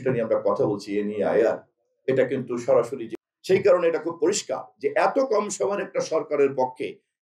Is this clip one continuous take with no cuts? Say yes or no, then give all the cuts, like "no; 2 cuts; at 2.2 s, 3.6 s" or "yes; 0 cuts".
no; 1 cut; at 3.1 s